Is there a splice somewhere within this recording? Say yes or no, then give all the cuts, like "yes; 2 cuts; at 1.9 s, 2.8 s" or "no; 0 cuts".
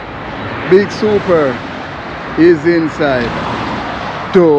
no; 0 cuts